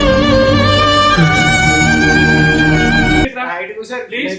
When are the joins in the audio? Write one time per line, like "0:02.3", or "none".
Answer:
0:03.2